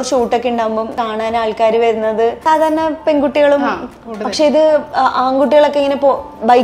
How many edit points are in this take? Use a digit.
2